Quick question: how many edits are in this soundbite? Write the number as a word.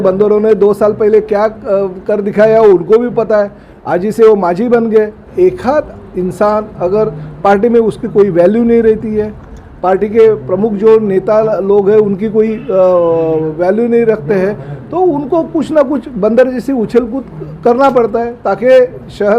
one